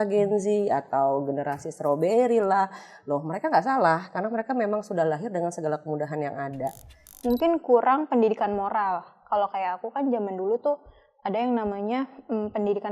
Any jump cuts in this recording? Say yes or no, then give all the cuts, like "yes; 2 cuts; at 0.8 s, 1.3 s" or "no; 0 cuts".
yes; 1 cut; at 7.0 s